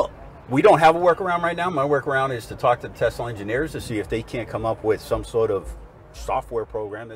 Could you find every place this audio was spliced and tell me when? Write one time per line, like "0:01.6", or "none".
none